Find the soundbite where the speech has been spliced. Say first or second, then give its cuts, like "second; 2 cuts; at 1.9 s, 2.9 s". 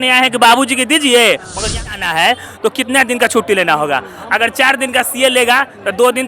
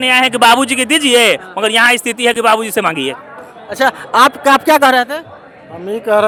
first; 1 cut; at 1.9 s